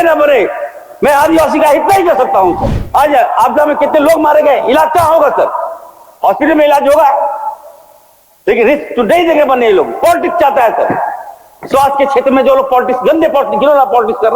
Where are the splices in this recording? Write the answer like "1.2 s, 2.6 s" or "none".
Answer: 2.7 s